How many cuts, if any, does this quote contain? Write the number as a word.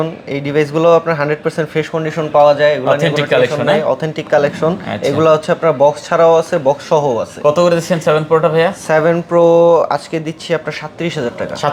zero